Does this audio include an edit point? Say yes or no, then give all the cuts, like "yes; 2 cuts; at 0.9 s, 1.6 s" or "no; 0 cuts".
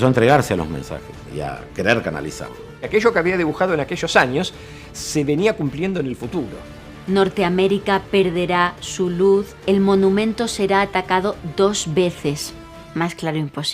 yes; 4 cuts; at 1.3 s, 2.8 s, 7.0 s, 9.5 s